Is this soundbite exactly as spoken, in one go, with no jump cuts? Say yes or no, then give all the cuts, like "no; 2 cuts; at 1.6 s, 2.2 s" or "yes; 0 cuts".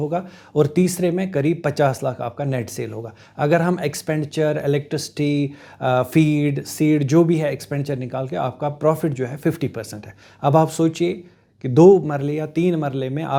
yes; 0 cuts